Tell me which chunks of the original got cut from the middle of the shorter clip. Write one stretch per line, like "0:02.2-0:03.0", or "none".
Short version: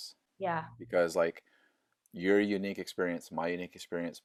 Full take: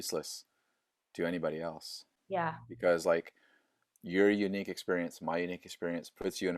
none